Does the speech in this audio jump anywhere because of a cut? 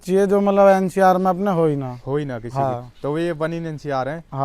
no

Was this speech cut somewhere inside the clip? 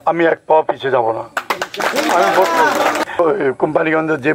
yes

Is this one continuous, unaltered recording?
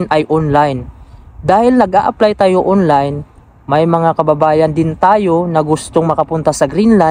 yes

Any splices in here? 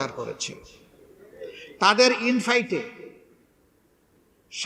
no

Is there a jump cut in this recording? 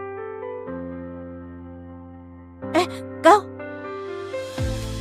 no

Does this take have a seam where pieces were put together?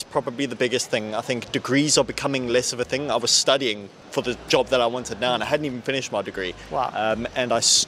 no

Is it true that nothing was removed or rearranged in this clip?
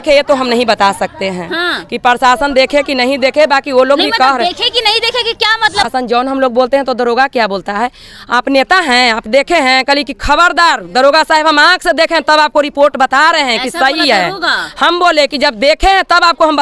no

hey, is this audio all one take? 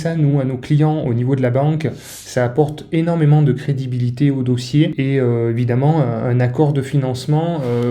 no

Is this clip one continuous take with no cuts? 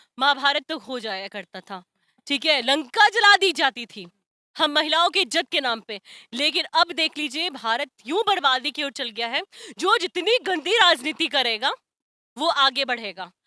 yes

